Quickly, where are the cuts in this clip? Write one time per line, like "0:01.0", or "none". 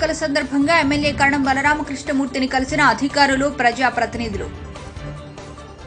none